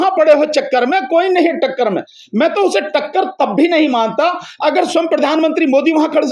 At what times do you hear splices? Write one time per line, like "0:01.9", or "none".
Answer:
none